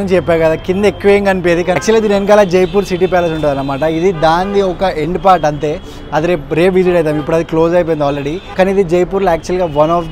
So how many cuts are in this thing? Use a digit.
0